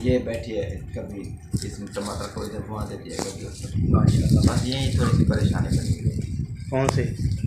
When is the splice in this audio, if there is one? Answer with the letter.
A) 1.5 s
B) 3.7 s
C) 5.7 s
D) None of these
B